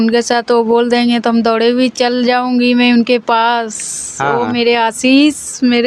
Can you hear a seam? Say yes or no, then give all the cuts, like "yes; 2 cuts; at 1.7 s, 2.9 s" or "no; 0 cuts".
no; 0 cuts